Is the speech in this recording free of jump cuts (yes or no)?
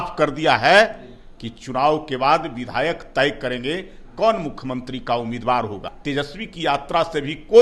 no